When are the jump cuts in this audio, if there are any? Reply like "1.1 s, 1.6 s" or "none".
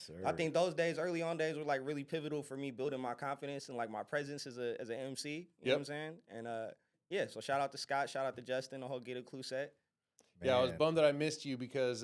none